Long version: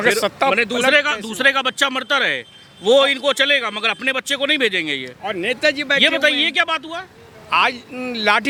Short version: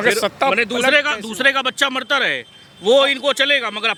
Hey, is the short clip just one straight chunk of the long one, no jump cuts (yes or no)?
yes